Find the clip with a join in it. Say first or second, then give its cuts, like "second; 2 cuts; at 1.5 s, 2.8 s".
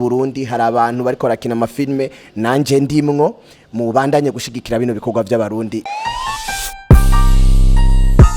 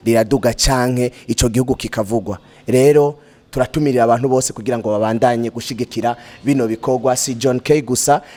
first; 1 cut; at 5.8 s